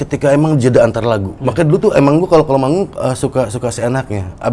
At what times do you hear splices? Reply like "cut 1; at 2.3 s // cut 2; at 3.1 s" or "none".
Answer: cut 1; at 1.4 s